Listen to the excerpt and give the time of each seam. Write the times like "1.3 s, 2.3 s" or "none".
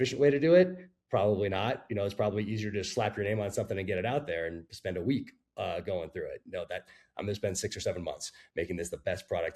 none